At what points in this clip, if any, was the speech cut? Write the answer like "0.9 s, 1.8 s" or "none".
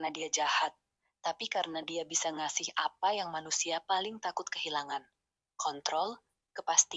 none